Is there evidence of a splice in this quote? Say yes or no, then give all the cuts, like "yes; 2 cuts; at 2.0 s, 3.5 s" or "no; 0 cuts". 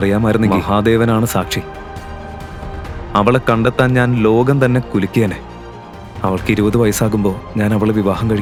no; 0 cuts